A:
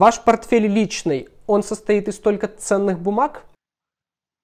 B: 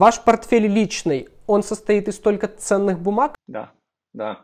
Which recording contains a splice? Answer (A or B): B